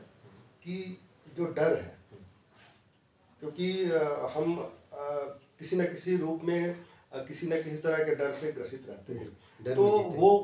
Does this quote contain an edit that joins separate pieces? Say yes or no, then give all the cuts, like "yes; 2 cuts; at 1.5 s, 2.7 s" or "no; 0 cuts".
no; 0 cuts